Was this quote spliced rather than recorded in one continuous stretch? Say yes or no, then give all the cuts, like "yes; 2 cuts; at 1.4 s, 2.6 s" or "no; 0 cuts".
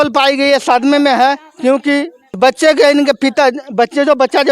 yes; 1 cut; at 2.2 s